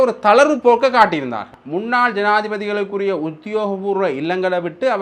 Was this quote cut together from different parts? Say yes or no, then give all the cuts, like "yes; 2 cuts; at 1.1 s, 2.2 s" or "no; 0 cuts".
yes; 1 cut; at 1.6 s